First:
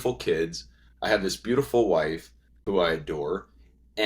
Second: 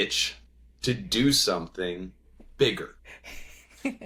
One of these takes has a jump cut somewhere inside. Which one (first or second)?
first